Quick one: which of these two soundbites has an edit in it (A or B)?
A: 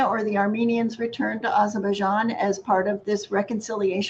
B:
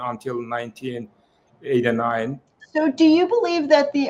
B